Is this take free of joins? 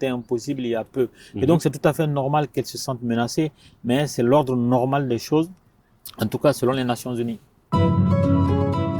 no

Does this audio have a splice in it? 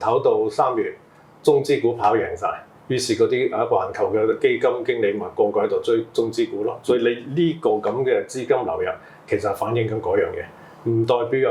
no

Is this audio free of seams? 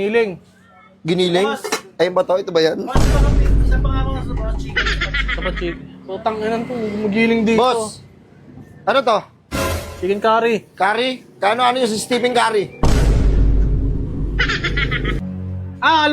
no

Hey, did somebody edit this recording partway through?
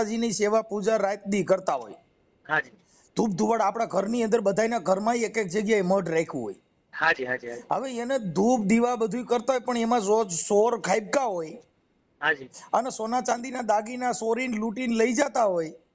no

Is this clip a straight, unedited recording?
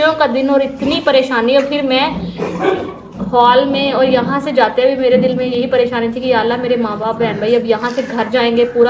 yes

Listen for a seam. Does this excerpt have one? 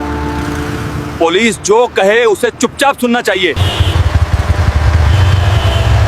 yes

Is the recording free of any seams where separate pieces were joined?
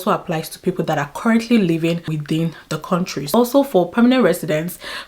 no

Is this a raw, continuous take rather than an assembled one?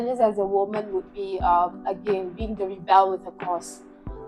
yes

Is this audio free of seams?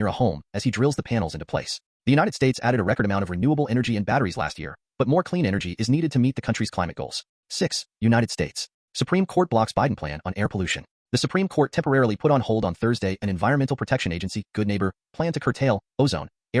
no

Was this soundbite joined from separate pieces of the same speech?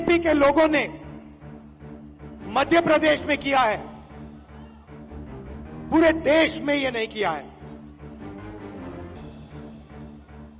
yes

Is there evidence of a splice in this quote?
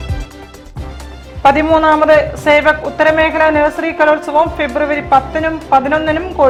no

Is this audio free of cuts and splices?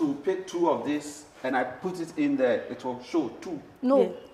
yes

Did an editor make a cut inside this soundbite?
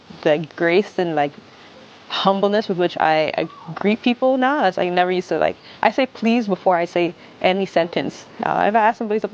no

